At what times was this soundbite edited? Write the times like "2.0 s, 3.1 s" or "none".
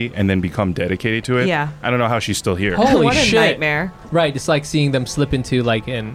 4.0 s